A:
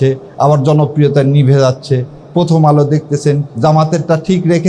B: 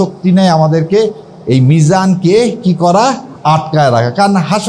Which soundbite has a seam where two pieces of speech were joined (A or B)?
A